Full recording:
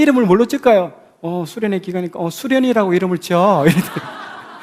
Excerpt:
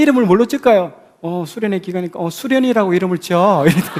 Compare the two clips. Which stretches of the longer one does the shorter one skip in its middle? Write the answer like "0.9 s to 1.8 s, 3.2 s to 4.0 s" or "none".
none